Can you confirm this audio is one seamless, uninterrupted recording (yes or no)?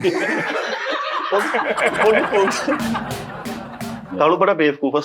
no